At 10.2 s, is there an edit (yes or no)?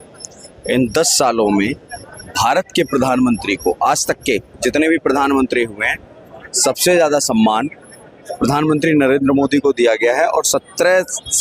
no